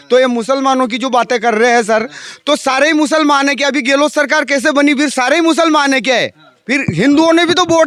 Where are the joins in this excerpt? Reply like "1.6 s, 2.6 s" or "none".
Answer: none